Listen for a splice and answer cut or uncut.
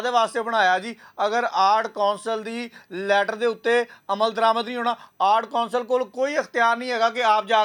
uncut